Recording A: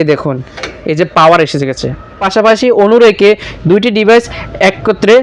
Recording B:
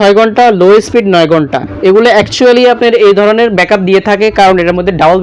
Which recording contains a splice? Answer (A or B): A